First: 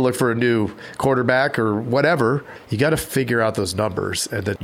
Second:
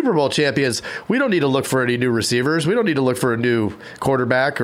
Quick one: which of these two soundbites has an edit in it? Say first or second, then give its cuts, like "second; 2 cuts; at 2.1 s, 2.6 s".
first; 1 cut; at 2.6 s